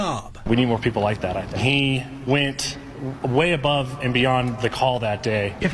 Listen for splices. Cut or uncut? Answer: uncut